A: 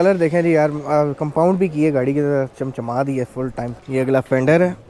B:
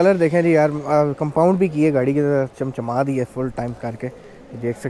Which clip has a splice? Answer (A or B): A